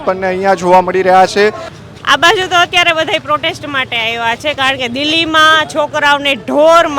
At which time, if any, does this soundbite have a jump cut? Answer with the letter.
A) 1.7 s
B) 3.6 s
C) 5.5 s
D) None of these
A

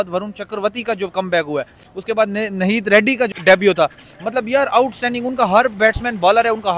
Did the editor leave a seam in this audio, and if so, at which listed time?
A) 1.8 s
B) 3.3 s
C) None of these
B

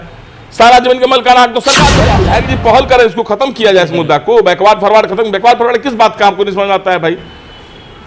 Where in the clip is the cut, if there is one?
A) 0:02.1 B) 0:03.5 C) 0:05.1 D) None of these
A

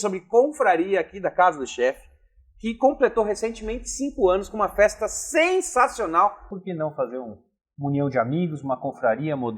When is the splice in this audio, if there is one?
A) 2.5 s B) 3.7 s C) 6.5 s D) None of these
C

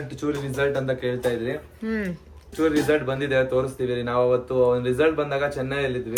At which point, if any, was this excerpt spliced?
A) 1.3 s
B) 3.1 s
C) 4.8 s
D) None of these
D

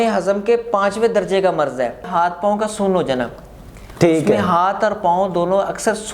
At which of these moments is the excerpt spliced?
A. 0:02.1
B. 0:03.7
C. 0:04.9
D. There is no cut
A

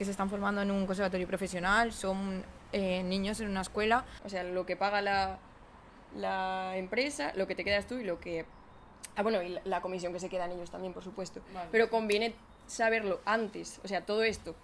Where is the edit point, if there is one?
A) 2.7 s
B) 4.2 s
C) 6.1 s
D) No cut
B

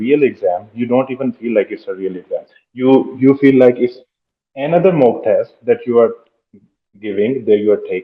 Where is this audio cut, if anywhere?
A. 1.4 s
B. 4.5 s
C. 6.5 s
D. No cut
D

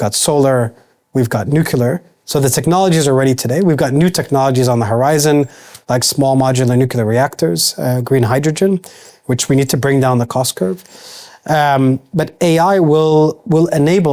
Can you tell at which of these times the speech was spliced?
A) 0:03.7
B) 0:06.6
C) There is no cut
C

